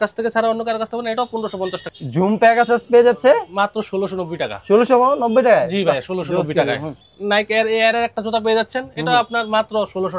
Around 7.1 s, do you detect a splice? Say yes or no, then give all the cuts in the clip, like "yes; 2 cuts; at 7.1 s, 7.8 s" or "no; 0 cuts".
yes; 2 cuts; at 1.9 s, 7.1 s